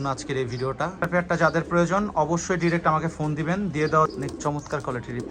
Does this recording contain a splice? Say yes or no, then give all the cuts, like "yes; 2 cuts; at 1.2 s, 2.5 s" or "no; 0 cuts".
yes; 2 cuts; at 0.9 s, 4.1 s